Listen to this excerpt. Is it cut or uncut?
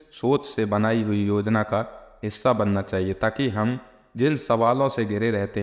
uncut